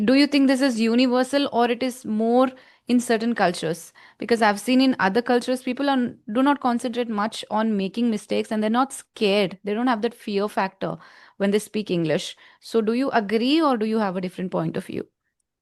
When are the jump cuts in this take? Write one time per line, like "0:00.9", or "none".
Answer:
none